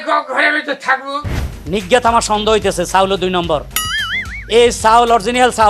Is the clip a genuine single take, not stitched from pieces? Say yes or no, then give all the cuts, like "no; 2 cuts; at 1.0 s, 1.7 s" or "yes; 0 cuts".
no; 1 cut; at 1.3 s